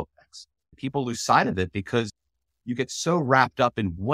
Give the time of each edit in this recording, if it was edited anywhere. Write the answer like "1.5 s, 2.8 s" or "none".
0.8 s, 2.1 s